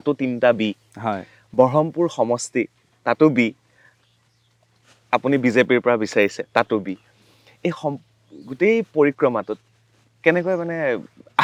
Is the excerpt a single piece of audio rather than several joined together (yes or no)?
yes